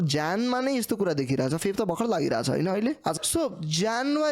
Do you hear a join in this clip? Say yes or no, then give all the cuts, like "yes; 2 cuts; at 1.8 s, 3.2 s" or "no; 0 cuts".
yes; 1 cut; at 3.2 s